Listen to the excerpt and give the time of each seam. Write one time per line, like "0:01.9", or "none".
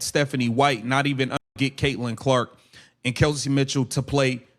0:01.5

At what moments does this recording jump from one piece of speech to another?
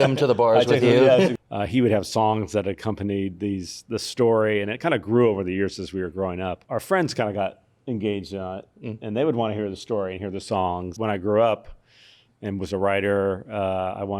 0:01.3
0:06.6
0:10.9

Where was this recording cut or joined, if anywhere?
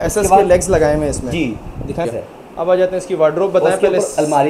0:02.1

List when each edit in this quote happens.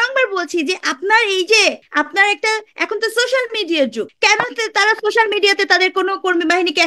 0:01.8
0:04.1

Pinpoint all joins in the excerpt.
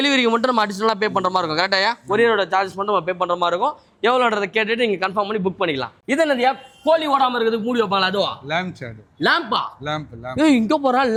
none

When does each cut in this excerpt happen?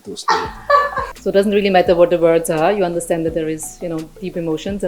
0:01.0

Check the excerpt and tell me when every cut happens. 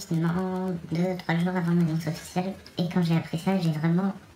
0:02.6

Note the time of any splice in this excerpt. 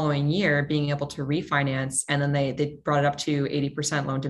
none

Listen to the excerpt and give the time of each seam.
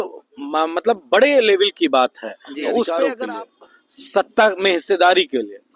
0:03.2

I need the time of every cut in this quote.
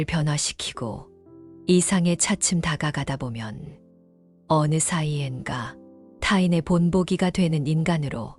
none

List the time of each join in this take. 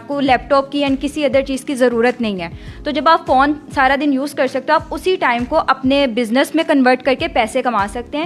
none

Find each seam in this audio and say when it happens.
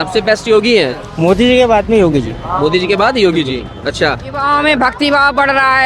0:01.1
0:04.4

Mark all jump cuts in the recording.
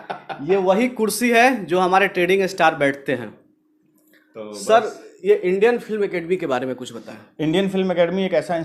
none

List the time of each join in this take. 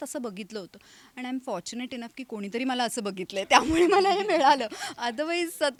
none

